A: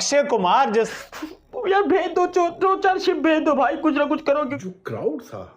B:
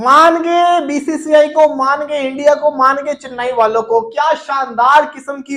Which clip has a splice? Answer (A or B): A